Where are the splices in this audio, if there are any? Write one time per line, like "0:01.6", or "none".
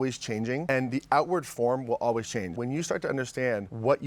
0:02.6